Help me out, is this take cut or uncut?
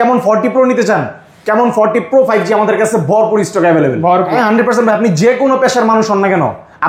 cut